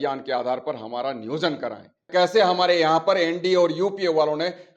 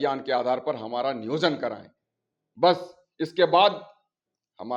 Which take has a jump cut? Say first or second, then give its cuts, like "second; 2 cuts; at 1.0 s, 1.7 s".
first; 1 cut; at 2.1 s